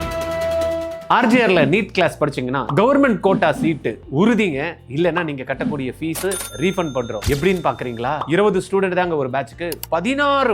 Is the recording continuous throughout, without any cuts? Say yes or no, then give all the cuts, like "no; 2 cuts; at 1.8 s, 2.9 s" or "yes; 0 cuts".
no; 1 cut; at 0.9 s